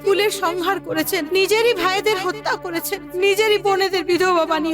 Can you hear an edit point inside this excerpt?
yes; 1 cut; at 3.0 s

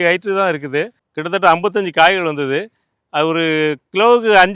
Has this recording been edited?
yes; 1 cut; at 1.1 s

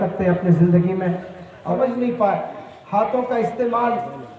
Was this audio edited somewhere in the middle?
yes; 1 cut; at 1.8 s

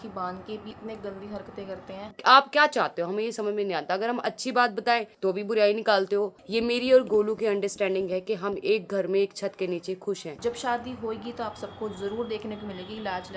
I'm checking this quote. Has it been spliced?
yes; 3 cuts; at 2.1 s, 6.4 s, 10.3 s

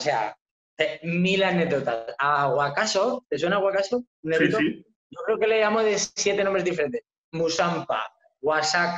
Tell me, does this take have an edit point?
no; 0 cuts

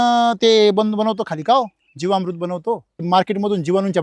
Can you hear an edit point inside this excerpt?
yes; 1 cut; at 3.0 s

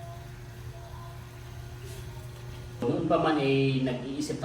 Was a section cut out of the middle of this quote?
yes; 1 cut; at 2.8 s

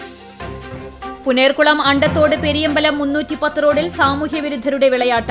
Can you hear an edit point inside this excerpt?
yes; 1 cut; at 1.2 s

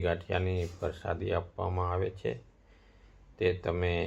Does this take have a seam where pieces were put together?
no; 0 cuts

